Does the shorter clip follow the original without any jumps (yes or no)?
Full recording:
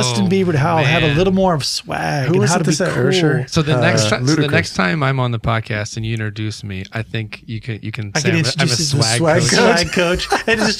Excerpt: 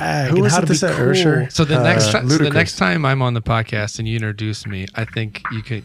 yes